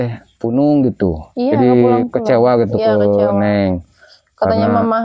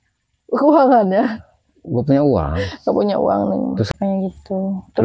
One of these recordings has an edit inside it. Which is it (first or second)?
second